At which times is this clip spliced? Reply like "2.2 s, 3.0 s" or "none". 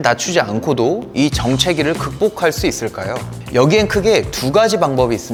none